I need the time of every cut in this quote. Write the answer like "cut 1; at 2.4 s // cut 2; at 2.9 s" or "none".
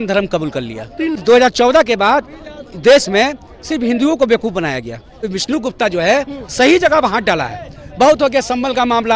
cut 1; at 1.2 s // cut 2; at 5.3 s